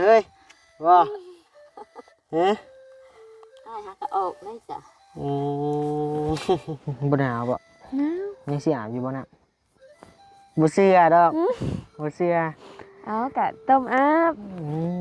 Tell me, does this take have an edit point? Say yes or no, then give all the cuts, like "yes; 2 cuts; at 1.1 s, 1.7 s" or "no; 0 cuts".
yes; 1 cut; at 6.8 s